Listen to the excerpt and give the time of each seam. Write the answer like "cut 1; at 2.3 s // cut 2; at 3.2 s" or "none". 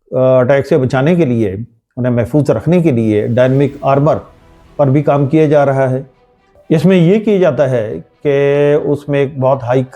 none